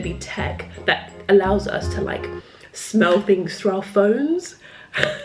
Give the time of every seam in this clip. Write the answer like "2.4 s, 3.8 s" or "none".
none